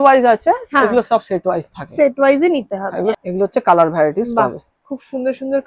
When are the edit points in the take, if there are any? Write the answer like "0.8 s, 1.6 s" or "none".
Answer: 3.2 s